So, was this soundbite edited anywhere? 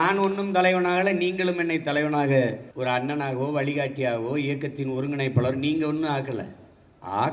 no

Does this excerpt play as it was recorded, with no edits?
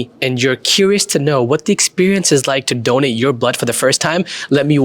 yes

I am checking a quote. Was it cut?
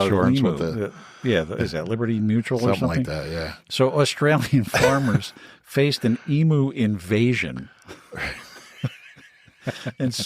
yes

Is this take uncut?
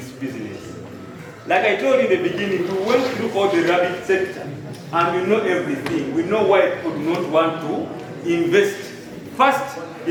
yes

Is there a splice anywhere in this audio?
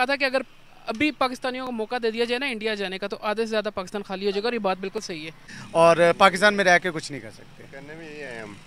yes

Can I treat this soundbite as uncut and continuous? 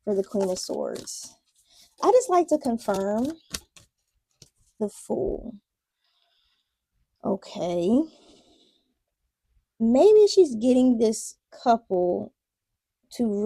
no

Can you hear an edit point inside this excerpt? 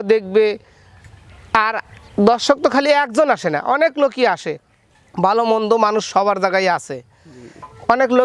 no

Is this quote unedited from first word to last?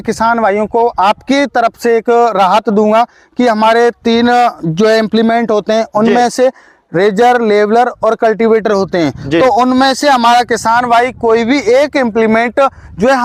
yes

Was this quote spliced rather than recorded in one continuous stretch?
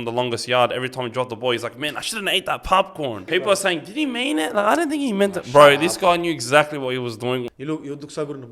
yes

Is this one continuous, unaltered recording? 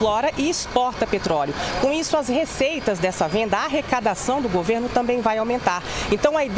yes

